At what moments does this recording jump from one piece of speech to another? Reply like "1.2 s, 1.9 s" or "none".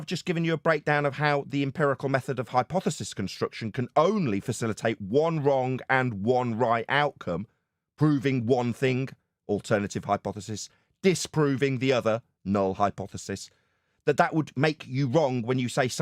none